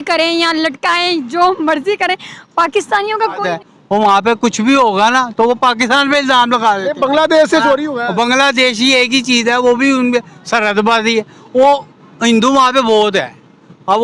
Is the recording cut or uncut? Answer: cut